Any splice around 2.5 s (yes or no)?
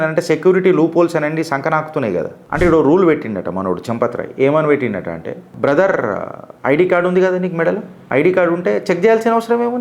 yes